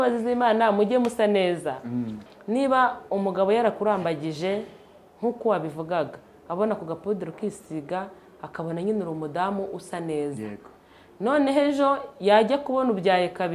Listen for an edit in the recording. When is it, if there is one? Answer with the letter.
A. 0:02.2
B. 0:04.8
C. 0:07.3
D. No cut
A